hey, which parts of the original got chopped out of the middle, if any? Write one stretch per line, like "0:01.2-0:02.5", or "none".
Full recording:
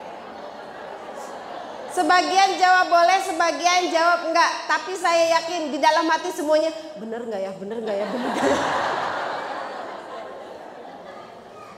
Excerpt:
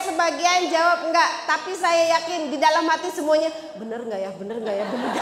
none